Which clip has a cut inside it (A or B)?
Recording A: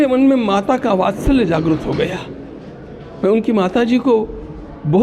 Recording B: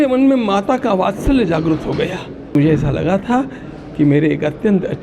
B